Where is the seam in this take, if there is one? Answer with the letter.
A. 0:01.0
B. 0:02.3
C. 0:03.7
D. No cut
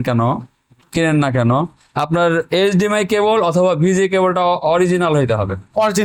D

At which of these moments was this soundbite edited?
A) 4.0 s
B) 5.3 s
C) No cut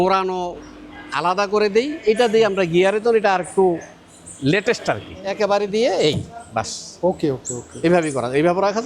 B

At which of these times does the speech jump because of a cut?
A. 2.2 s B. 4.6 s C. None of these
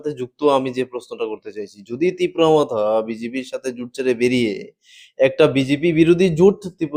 C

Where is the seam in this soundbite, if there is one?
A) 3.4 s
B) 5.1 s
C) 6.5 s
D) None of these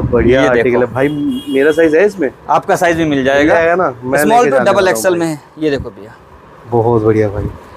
D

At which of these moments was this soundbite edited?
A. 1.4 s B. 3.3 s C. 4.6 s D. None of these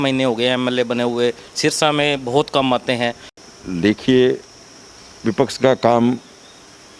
B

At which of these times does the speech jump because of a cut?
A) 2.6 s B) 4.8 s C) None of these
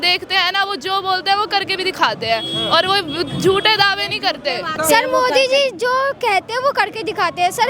B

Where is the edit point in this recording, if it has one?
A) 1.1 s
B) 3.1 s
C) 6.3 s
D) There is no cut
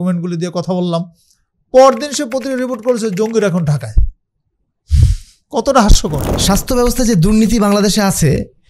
C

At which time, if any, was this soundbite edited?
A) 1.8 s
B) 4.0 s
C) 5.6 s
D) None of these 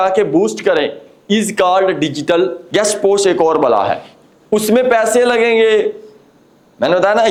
D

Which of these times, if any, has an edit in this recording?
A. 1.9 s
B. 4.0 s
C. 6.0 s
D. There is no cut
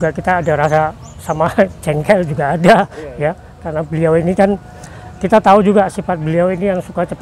D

